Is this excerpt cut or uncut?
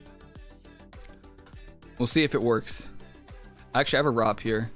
uncut